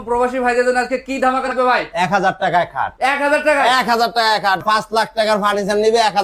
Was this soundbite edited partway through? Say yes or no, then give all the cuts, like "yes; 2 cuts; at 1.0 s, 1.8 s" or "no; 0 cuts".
yes; 2 cuts; at 1.5 s, 4.6 s